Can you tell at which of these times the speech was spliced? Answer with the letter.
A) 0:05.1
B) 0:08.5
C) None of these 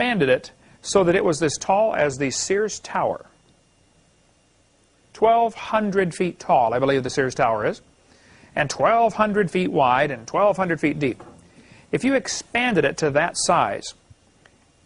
A